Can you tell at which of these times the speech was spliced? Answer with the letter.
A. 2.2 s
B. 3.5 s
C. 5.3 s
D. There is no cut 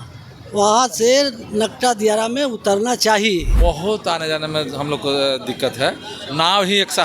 B